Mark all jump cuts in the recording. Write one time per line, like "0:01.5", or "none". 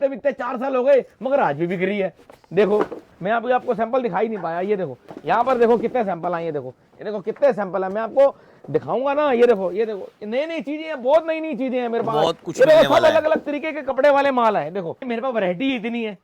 0:03.1
0:15.0